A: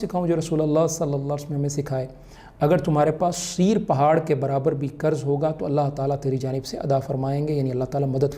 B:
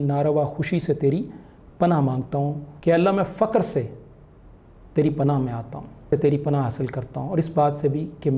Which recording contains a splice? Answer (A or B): B